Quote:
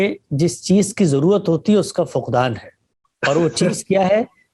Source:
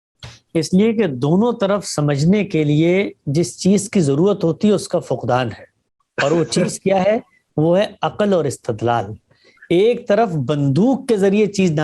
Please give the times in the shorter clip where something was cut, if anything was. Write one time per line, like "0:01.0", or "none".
none